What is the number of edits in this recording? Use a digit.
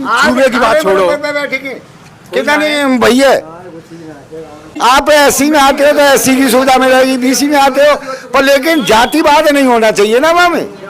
1